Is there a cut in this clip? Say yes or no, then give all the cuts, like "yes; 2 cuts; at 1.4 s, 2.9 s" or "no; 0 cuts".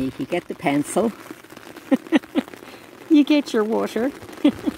no; 0 cuts